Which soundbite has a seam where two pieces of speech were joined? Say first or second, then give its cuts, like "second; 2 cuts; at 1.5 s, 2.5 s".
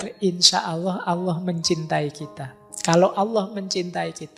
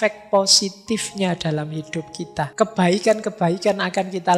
second; 1 cut; at 2.5 s